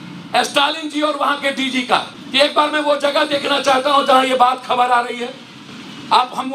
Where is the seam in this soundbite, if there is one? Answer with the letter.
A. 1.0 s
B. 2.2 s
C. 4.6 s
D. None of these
B